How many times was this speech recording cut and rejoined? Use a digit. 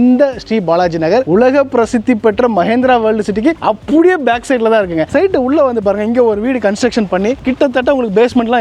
2